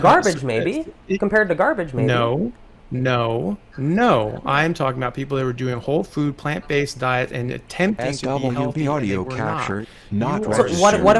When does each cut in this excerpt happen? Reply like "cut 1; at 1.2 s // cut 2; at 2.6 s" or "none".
none

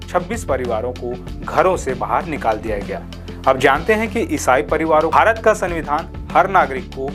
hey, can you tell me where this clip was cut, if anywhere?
cut 1; at 5.1 s

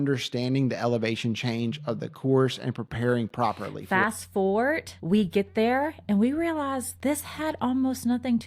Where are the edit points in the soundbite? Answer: cut 1; at 3.7 s // cut 2; at 4.9 s // cut 3; at 6.9 s

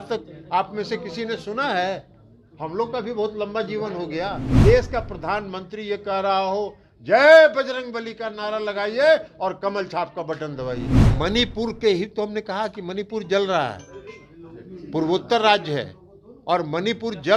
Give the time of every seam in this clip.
cut 1; at 4.5 s // cut 2; at 10.9 s

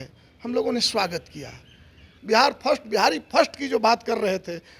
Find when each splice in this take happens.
cut 1; at 2.1 s

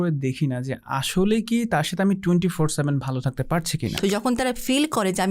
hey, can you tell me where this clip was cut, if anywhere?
cut 1; at 3.9 s

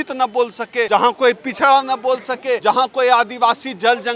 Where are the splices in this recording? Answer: cut 1; at 0.9 s // cut 2; at 2.6 s

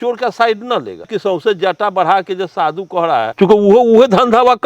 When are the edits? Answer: cut 1; at 1.1 s // cut 2; at 3.3 s

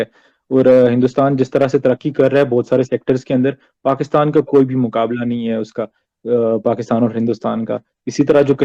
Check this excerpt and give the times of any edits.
none

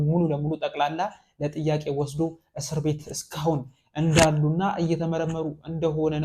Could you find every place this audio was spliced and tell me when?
none

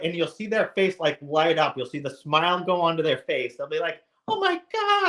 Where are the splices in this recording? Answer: none

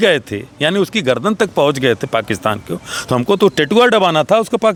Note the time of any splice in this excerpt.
none

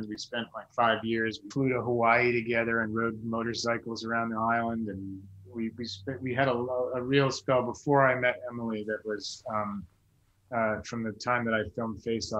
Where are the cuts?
cut 1; at 1.4 s

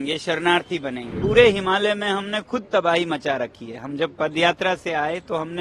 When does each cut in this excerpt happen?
cut 1; at 1.1 s

